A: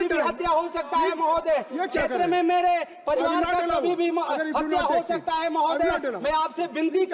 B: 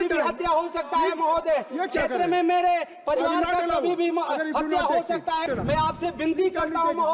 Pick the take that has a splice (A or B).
B